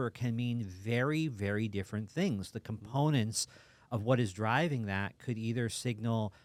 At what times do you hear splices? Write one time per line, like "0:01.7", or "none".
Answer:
none